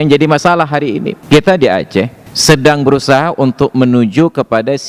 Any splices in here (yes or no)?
yes